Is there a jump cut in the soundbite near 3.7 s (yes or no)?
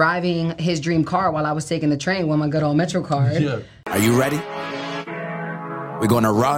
yes